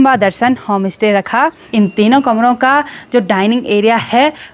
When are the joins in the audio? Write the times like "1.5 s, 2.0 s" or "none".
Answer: 1.6 s